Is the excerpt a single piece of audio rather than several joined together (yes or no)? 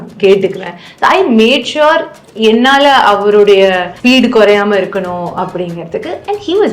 no